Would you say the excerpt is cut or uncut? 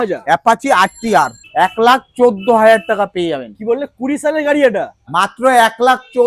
cut